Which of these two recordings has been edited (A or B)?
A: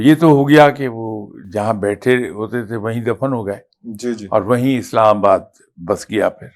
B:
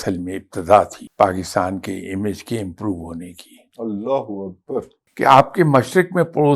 B